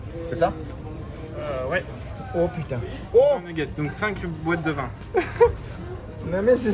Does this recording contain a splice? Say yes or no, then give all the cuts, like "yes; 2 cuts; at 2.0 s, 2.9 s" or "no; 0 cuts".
yes; 1 cut; at 5.0 s